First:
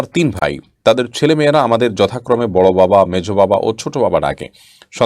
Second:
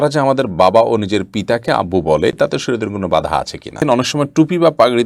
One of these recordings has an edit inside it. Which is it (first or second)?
second